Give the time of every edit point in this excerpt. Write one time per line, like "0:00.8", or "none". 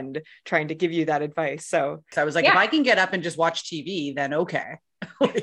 0:02.1